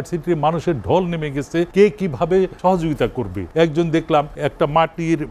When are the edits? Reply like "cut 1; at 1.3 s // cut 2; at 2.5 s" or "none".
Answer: cut 1; at 1.7 s // cut 2; at 2.9 s // cut 3; at 4.4 s

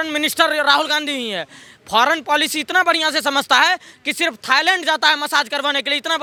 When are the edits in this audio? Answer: none

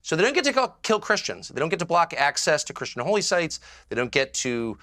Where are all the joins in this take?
none

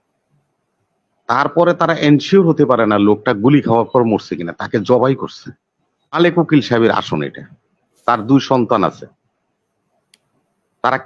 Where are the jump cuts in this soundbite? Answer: cut 1; at 6.2 s

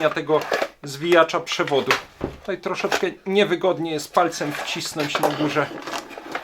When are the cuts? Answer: none

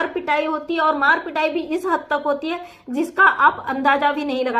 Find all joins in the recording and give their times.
none

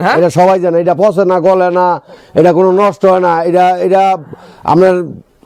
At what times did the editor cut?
none

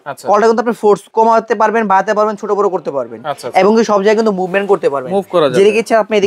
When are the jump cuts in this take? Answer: cut 1; at 1.1 s

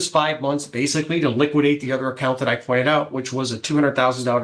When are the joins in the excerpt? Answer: none

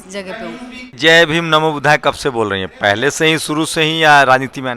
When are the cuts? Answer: cut 1; at 0.9 s

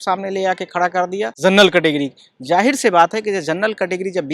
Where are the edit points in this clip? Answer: cut 1; at 1.3 s

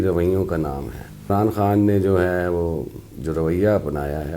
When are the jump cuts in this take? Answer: cut 1; at 1.3 s

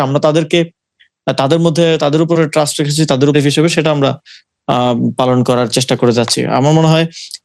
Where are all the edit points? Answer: cut 1; at 3.3 s

